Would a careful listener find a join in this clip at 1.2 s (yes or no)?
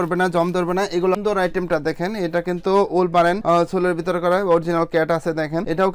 yes